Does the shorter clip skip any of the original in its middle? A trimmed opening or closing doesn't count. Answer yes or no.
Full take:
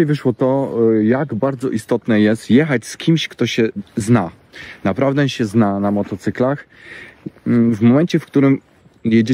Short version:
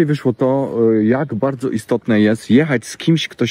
no